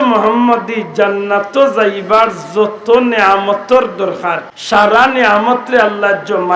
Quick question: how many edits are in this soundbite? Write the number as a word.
one